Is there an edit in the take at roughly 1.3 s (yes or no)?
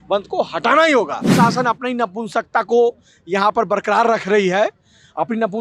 yes